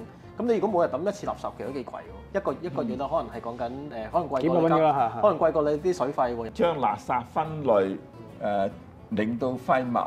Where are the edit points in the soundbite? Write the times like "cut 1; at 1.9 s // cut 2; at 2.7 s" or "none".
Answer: cut 1; at 2.2 s // cut 2; at 6.5 s